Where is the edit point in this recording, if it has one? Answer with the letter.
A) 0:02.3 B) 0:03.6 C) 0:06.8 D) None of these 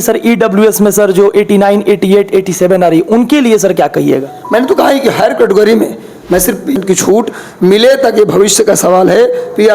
C